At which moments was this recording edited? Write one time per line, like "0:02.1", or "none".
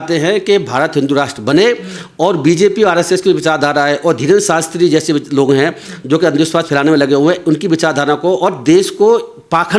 none